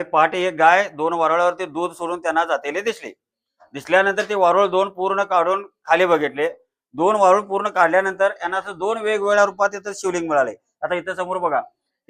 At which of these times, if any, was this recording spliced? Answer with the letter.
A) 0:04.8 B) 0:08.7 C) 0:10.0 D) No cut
D